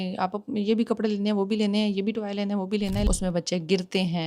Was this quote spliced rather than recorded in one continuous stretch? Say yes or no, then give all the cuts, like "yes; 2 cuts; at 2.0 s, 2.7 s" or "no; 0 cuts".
yes; 1 cut; at 3.1 s